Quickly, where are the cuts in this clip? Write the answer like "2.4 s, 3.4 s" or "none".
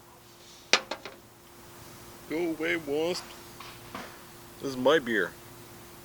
none